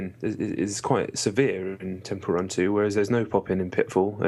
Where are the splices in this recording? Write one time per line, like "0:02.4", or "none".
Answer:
0:02.8